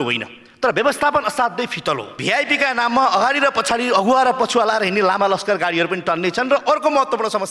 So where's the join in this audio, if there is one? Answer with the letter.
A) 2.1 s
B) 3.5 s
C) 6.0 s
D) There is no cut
A